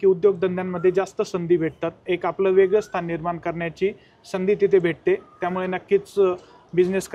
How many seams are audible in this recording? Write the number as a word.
one